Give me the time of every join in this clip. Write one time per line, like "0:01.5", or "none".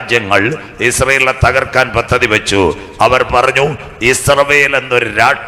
none